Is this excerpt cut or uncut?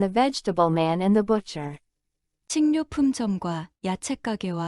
cut